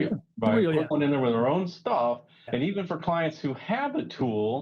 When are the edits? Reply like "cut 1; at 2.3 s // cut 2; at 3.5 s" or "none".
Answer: cut 1; at 0.9 s // cut 2; at 2.5 s